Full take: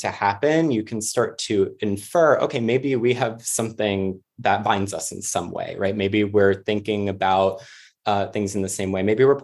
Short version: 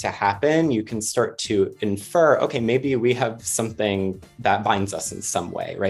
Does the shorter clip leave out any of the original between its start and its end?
no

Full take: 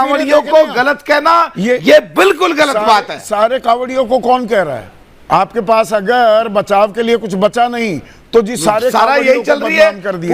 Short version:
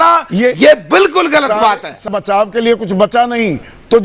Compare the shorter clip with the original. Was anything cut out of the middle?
yes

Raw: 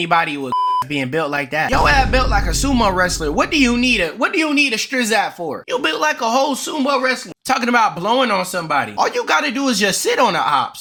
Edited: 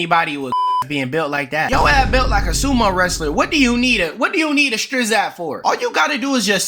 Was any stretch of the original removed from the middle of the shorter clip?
yes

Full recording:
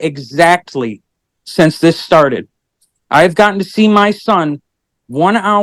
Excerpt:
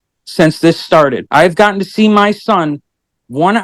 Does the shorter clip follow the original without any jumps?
no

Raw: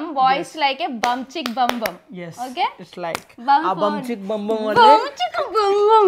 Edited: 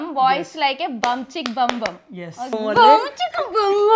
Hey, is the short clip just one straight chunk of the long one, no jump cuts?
no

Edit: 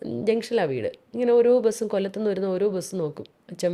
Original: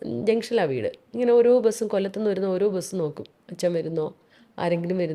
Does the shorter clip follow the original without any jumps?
yes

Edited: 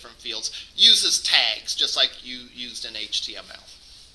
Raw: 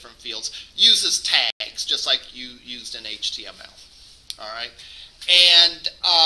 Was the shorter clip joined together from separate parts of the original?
yes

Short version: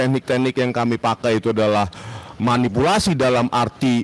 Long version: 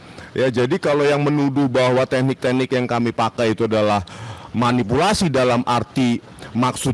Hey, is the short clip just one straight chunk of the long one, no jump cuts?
yes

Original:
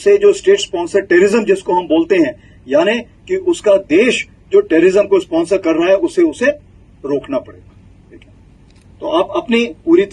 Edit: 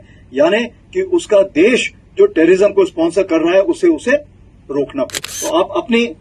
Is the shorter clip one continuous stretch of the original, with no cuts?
no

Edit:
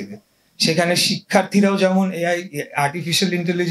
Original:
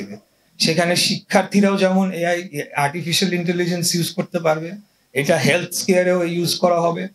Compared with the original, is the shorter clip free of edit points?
yes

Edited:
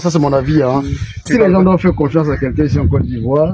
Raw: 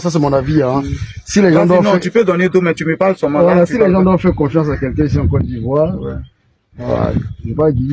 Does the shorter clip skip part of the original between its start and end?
yes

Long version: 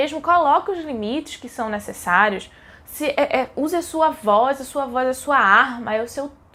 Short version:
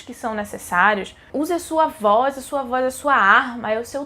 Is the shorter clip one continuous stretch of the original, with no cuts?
no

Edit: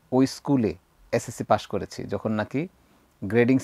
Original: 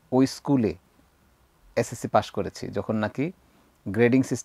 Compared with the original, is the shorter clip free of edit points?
no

